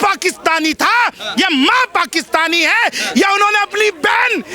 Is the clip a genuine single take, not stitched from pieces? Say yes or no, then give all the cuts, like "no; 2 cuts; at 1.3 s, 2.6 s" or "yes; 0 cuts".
yes; 0 cuts